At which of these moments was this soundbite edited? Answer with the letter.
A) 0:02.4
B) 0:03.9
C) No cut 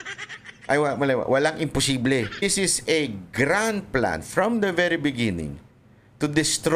A